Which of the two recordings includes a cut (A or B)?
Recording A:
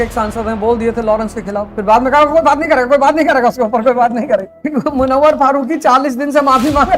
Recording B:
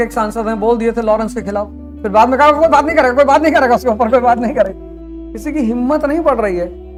A